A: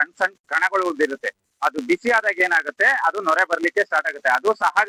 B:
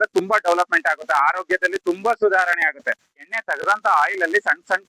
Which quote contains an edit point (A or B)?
B